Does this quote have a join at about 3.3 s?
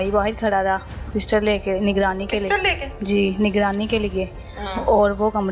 no; 0 cuts

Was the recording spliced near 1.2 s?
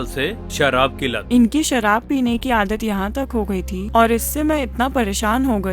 yes; 2 cuts; at 1.2 s, 3.8 s

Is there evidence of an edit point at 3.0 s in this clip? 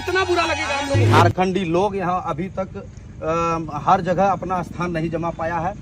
no; 1 cut; at 1.1 s

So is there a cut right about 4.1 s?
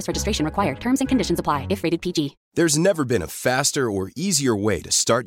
no; 1 cut; at 2.4 s

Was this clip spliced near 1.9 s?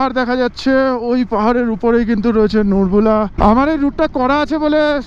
no; 1 cut; at 3.3 s

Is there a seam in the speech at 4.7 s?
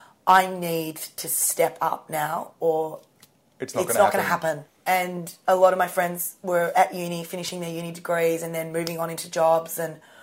yes; 1 cut; at 4.7 s

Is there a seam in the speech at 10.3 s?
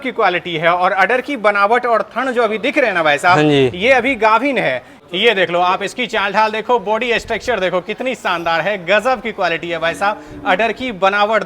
no; 1 cut; at 5.0 s

